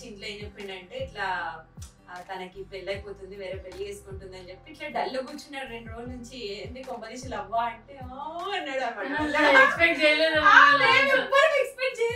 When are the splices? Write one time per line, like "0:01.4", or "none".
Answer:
none